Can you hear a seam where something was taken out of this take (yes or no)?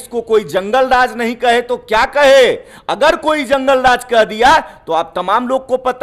no